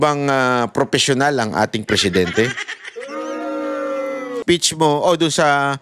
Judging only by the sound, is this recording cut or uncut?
cut